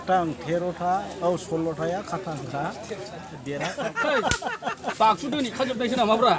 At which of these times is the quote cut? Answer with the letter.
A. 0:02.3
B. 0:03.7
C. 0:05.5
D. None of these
B